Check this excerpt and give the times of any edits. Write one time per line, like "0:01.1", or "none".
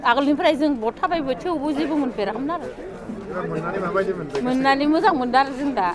none